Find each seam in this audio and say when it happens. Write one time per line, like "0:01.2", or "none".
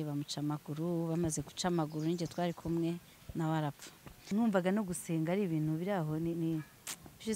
0:04.3